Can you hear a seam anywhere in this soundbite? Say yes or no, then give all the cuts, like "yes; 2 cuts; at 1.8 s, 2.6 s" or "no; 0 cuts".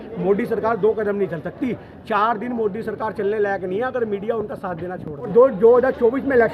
yes; 1 cut; at 5.3 s